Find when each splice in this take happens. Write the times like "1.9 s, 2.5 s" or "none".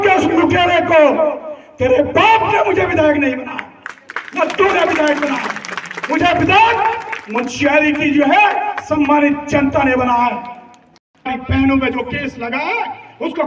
11.3 s